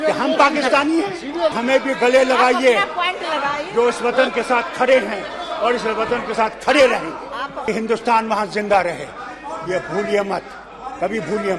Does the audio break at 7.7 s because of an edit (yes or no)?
yes